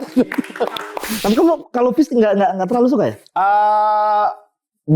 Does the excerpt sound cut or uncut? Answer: cut